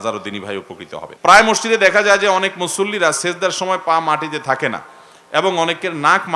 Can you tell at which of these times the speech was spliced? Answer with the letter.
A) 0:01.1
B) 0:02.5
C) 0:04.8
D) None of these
A